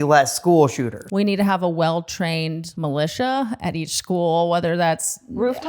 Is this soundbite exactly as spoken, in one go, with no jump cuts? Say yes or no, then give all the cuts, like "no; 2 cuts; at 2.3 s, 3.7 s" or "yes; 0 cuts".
no; 2 cuts; at 1.0 s, 2.7 s